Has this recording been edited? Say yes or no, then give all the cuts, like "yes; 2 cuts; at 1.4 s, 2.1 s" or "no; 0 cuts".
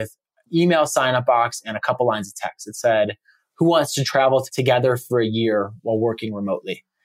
no; 0 cuts